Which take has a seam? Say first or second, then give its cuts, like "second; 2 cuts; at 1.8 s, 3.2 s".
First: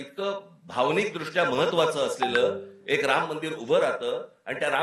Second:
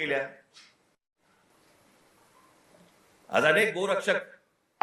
second; 1 cut; at 1.5 s